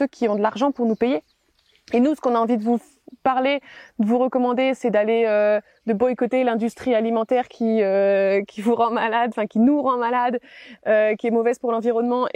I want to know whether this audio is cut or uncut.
uncut